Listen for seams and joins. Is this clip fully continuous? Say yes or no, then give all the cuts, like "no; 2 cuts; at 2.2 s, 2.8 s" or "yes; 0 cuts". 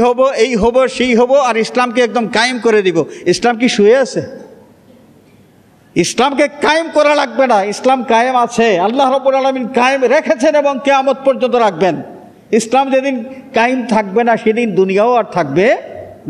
yes; 0 cuts